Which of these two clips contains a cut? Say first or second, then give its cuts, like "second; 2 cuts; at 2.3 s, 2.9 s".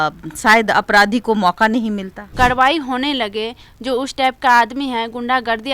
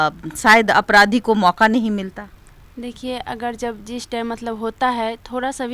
first; 1 cut; at 2.2 s